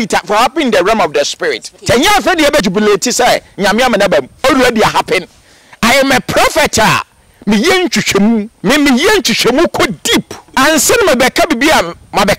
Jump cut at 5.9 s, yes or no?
no